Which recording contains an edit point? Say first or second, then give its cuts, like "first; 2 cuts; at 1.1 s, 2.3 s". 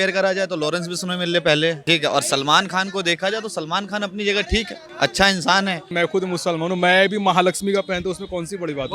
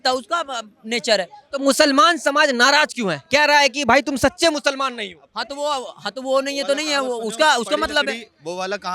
first; 3 cuts; at 1.8 s, 4.8 s, 5.9 s